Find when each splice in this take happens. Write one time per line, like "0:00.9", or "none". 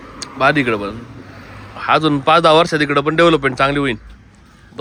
none